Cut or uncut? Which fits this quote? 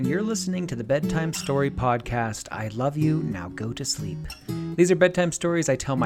uncut